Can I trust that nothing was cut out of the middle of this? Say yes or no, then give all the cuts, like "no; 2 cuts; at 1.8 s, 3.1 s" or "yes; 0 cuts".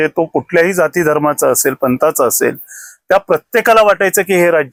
yes; 0 cuts